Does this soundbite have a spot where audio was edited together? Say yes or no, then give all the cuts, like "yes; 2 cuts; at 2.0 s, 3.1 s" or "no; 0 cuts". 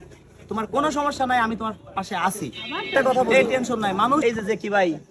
yes; 1 cut; at 4.2 s